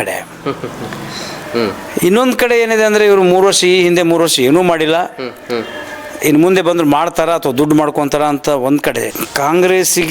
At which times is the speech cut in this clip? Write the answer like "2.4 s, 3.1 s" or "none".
9.1 s